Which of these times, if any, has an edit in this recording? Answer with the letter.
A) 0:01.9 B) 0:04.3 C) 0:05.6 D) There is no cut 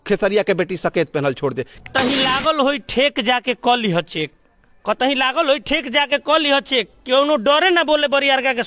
A